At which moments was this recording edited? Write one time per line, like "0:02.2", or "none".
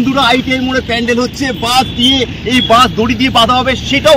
none